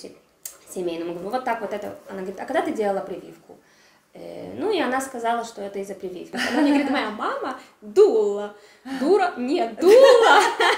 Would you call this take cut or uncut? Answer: cut